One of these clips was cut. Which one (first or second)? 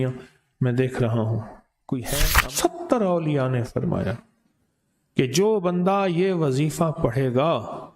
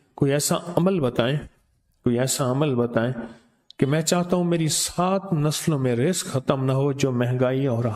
first